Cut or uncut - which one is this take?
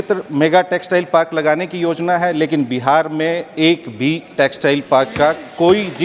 uncut